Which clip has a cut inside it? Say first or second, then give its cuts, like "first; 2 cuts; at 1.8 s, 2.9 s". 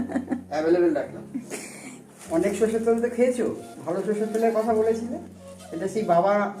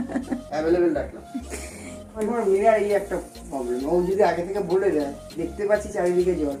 first; 1 cut; at 2.1 s